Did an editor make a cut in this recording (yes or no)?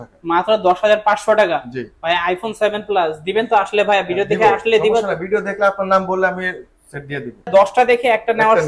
yes